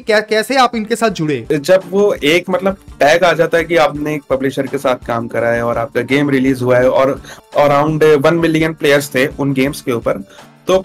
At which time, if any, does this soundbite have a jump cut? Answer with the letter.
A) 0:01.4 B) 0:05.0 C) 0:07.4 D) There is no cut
A